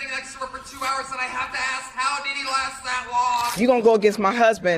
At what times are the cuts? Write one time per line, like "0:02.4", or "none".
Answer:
0:01.5
0:03.5